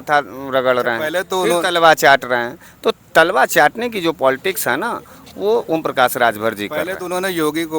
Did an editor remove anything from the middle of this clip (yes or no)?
no